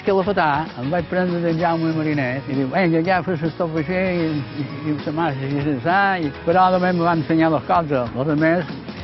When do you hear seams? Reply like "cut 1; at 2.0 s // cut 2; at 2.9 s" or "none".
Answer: cut 1; at 2.4 s // cut 2; at 6.4 s